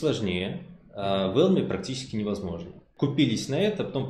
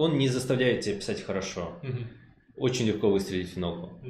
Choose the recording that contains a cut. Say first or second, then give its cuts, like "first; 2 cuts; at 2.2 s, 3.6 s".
first; 1 cut; at 2.9 s